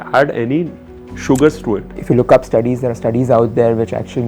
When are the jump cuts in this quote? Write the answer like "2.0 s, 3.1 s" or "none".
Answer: 1.9 s